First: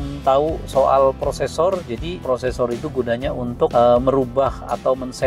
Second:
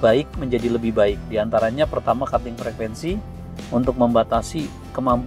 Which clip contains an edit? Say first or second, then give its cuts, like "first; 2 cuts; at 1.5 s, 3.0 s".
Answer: first; 2 cuts; at 2.2 s, 3.7 s